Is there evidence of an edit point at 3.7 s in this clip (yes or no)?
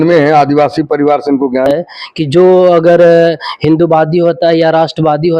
no